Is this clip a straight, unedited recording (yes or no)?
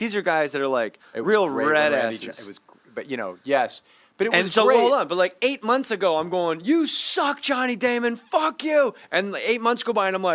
no